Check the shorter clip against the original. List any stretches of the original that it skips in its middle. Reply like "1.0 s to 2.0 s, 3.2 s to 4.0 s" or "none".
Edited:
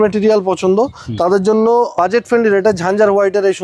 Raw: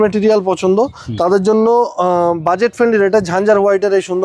1.9 s to 2.4 s